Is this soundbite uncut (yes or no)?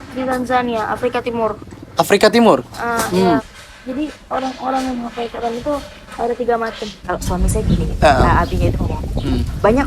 no